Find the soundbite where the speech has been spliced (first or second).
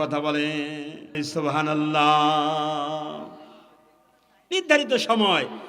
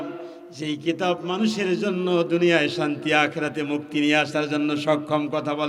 first